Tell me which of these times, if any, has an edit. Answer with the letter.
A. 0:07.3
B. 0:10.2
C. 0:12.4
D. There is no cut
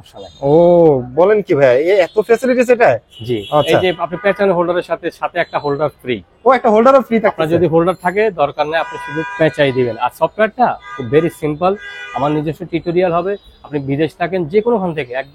D